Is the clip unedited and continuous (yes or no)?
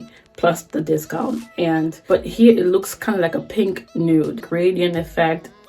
no